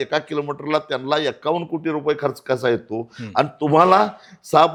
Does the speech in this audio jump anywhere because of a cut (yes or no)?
no